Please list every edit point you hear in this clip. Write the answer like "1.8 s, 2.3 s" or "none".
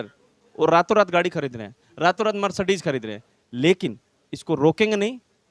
none